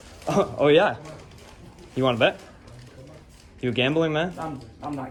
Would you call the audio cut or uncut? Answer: uncut